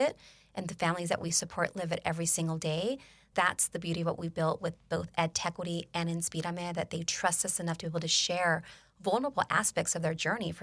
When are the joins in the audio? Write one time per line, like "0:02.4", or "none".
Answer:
0:03.2